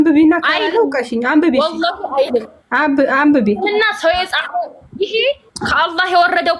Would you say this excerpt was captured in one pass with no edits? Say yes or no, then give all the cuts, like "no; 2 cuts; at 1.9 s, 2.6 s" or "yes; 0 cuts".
yes; 0 cuts